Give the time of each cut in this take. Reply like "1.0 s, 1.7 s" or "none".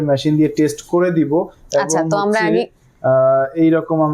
none

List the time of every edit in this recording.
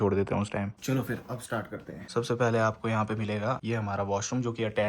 0.8 s, 2.0 s, 3.6 s

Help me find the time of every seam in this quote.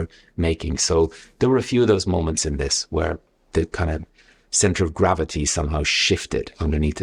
none

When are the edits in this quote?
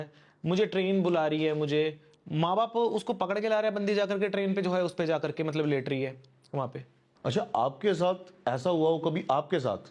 7.1 s

